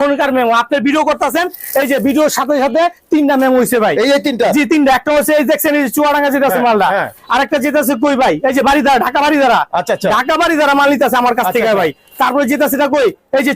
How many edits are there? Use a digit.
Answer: 0